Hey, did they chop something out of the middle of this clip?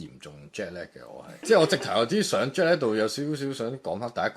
yes; 1 cut; at 1.4 s

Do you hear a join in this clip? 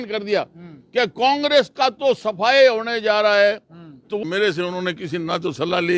yes; 1 cut; at 4.2 s

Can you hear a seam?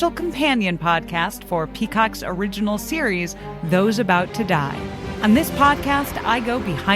yes; 1 cut; at 5.1 s

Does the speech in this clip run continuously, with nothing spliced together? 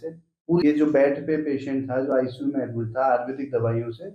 yes; 0 cuts

